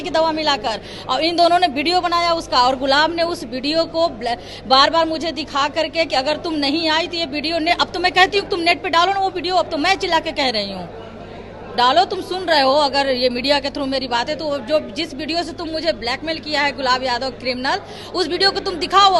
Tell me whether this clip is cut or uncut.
uncut